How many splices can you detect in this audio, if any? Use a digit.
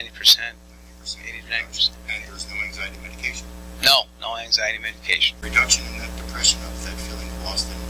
1